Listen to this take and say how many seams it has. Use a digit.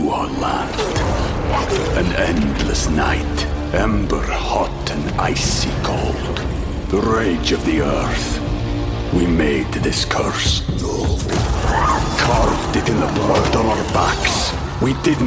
0